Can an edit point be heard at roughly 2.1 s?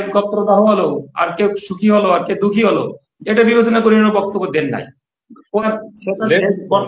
no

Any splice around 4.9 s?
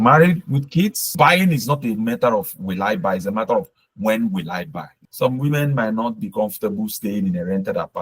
yes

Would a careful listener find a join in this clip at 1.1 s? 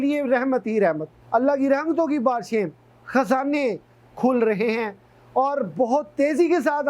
yes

